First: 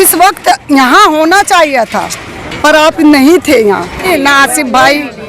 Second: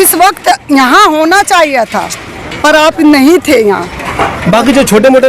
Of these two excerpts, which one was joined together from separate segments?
first; 1 cut; at 4.1 s

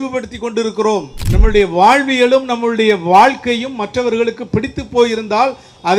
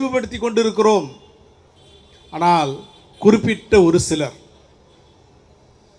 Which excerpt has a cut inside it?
first; 1 cut; at 1.2 s

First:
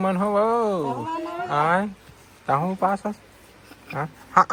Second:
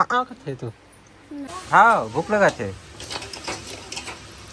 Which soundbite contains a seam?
second; 1 cut; at 1.5 s

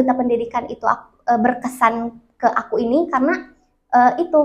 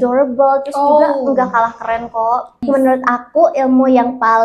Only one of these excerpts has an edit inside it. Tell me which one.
second; 1 cut; at 2.5 s

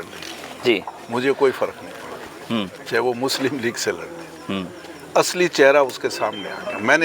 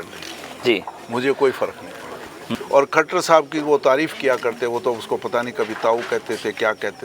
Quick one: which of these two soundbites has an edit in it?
second; 1 cut; at 2.5 s

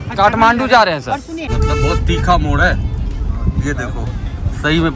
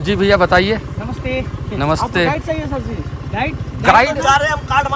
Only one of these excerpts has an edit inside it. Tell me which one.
first; 1 cut; at 1.5 s

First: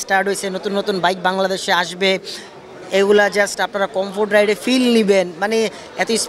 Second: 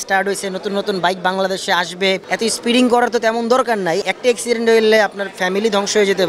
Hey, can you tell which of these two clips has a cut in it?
second; 2 cuts; at 2.3 s, 4.0 s

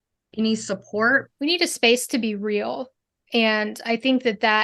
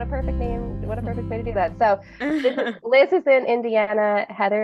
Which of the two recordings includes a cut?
first; 1 cut; at 1.3 s

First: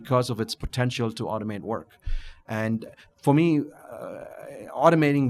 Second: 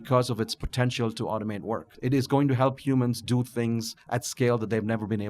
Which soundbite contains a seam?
second; 1 cut; at 1.9 s

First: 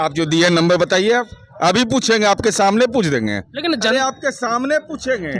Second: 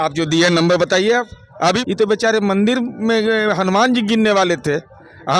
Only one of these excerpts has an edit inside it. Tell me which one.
second; 1 cut; at 1.8 s

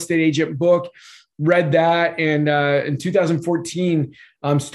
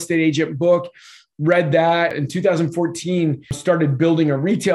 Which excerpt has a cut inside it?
second; 2 cuts; at 2.2 s, 3.6 s

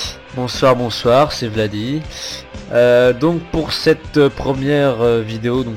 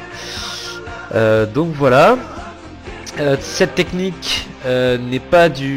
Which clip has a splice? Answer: second; 1 cut; at 1.3 s

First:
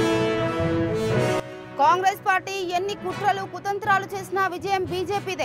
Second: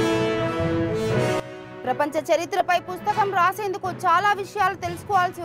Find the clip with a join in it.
second; 1 cut; at 1.4 s

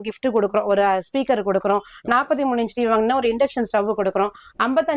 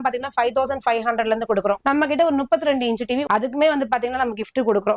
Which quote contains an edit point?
second; 2 cuts; at 1.8 s, 3.2 s

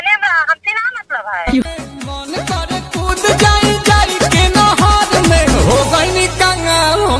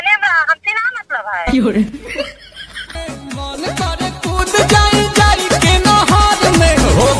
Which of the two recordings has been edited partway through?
first; 1 cut; at 1.6 s

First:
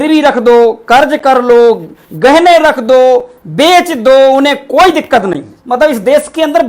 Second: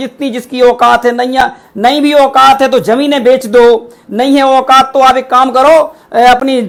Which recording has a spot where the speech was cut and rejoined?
first; 1 cut; at 5.5 s

